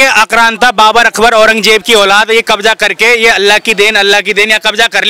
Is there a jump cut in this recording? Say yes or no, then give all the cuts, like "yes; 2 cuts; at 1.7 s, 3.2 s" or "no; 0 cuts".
no; 0 cuts